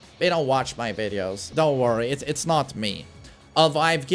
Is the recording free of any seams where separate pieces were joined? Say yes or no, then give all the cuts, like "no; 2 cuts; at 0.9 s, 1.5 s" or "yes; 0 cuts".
no; 1 cut; at 1.5 s